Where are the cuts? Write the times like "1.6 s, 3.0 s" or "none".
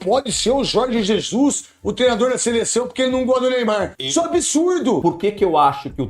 4.0 s, 5.0 s